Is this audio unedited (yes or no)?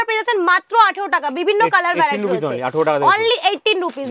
yes